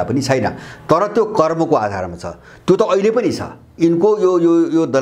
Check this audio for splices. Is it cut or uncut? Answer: uncut